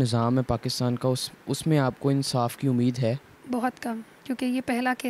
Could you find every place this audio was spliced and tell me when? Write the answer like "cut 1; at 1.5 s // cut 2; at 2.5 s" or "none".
cut 1; at 3.3 s // cut 2; at 4.1 s

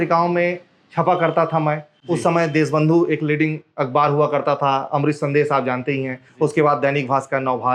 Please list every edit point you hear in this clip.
none

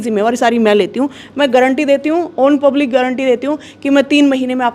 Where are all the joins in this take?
none

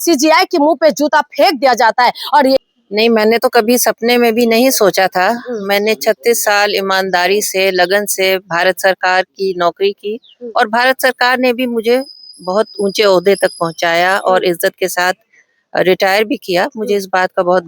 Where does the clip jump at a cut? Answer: cut 1; at 2.6 s

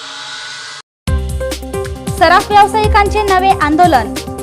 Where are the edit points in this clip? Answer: none

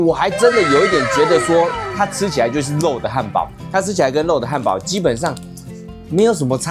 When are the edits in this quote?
none

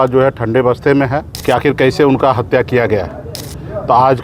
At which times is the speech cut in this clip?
cut 1; at 1.3 s

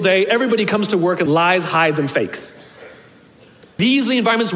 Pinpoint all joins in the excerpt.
cut 1; at 1.2 s // cut 2; at 3.8 s

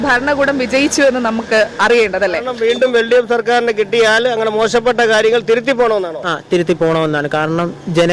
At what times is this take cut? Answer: cut 1; at 2.5 s

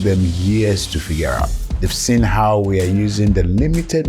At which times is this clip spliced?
cut 1; at 1.6 s

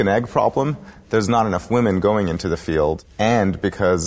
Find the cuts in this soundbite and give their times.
cut 1; at 3.1 s

